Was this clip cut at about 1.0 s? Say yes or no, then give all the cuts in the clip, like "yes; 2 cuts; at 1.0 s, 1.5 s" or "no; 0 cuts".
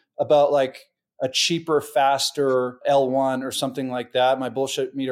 no; 1 cut; at 2.8 s